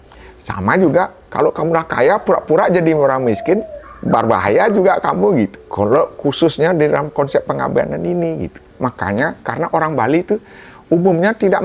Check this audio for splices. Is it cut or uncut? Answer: cut